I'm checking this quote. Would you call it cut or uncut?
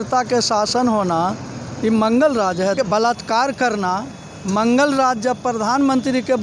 cut